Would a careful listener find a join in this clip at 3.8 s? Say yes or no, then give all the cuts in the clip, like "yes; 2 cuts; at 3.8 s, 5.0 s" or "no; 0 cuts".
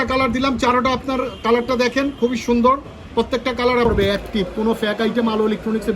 yes; 1 cut; at 3.8 s